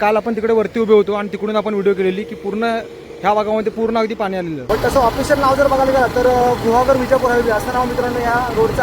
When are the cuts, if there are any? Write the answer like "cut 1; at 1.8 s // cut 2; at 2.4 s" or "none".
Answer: cut 1; at 4.6 s